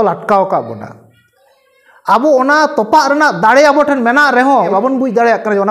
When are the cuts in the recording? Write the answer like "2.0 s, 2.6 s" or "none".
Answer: 4.7 s